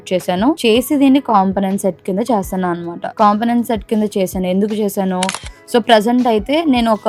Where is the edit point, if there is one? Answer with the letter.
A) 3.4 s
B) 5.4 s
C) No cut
B